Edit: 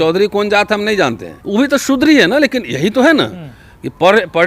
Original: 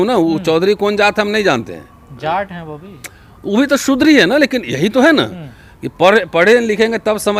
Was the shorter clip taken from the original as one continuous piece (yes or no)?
no